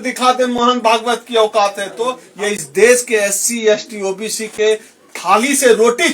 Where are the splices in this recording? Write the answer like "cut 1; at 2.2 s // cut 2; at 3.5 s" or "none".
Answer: cut 1; at 2.2 s